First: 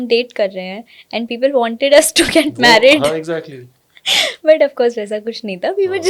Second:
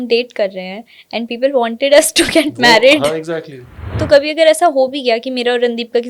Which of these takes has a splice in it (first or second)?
second